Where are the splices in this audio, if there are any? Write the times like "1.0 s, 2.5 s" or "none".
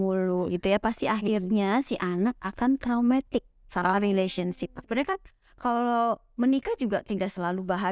4.8 s